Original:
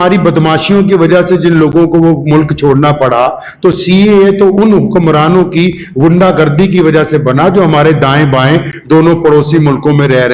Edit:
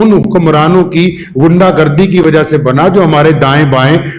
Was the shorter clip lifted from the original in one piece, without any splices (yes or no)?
yes